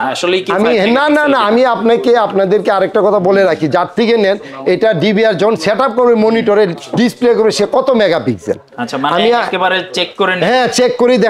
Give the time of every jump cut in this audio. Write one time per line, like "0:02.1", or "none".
none